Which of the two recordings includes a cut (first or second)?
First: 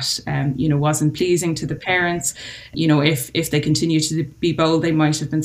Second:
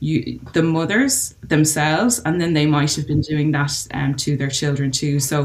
first